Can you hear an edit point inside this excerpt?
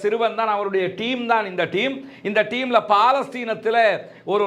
no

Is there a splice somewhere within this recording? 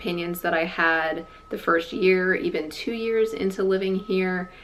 no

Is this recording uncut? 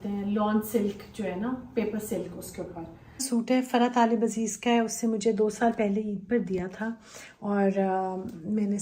no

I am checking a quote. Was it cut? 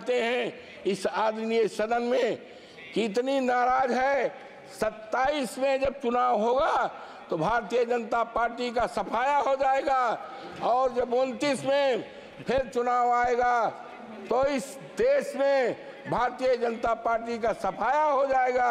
no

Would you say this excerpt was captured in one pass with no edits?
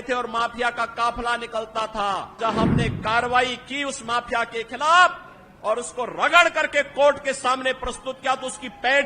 no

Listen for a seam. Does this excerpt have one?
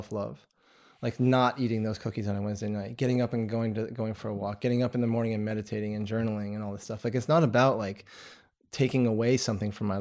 no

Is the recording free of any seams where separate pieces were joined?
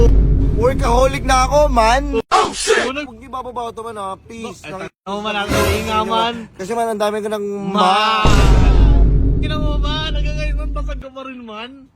no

